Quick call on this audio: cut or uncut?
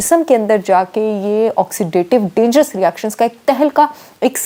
uncut